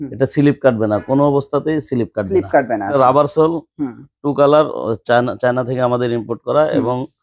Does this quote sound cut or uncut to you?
cut